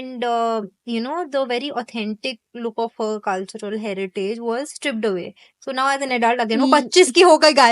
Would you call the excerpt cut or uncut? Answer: uncut